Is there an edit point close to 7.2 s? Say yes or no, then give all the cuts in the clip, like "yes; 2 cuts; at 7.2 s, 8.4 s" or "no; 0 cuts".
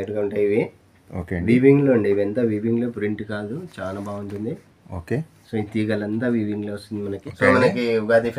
yes; 1 cut; at 7.2 s